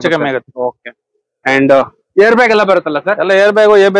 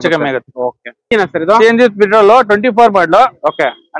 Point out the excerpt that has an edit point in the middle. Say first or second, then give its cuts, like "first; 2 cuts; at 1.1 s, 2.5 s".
second; 1 cut; at 1.1 s